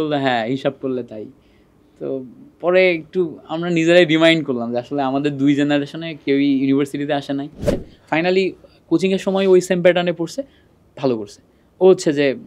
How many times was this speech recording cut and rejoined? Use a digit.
1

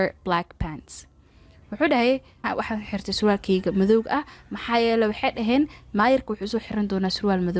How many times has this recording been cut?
0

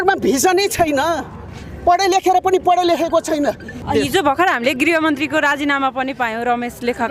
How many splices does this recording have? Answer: 1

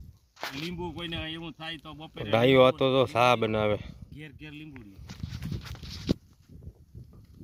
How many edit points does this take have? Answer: 0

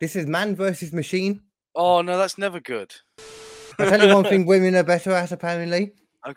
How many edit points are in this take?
2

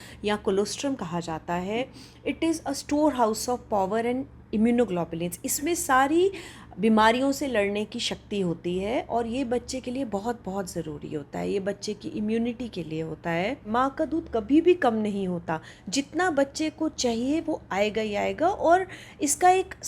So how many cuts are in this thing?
1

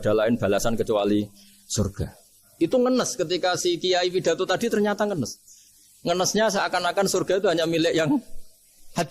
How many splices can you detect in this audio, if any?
1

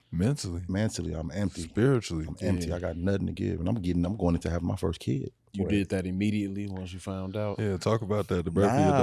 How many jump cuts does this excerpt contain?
1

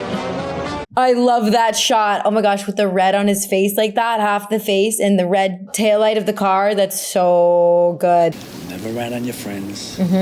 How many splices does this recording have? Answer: 1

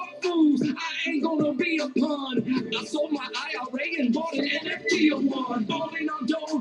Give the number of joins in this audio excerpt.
1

